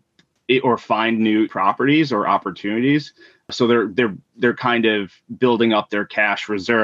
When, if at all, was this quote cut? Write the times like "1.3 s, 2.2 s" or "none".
1.5 s, 3.5 s